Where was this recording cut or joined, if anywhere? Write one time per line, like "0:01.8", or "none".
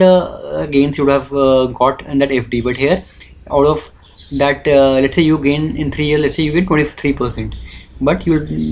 none